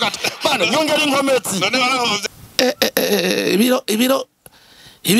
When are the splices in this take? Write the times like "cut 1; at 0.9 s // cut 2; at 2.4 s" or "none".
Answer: cut 1; at 2.2 s